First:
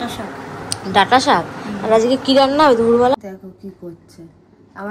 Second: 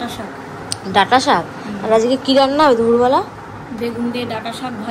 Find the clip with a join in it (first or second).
first